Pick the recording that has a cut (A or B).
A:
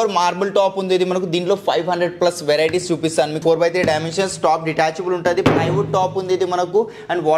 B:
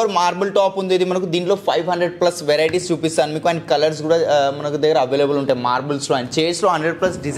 A